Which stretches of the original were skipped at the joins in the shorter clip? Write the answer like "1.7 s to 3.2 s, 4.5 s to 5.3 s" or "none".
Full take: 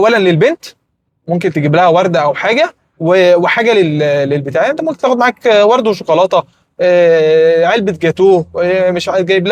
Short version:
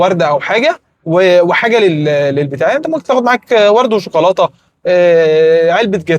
none